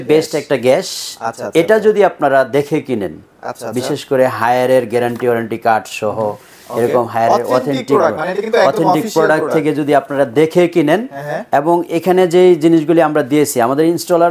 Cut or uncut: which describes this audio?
uncut